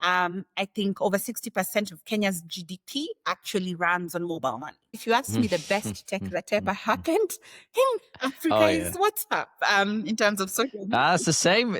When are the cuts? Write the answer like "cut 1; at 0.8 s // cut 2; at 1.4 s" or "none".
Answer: cut 1; at 4.9 s